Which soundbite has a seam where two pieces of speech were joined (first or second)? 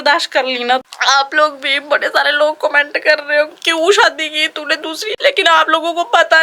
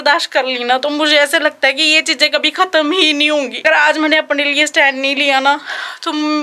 first